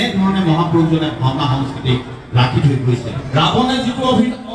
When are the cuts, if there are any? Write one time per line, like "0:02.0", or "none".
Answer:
0:03.2